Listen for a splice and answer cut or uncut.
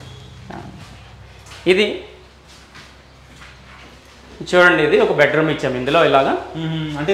uncut